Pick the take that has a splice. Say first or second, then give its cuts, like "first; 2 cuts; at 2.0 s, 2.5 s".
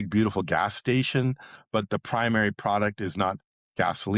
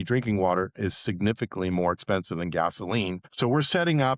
second; 1 cut; at 3.2 s